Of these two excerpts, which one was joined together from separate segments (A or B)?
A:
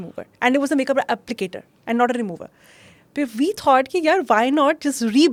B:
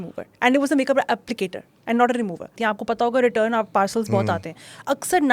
B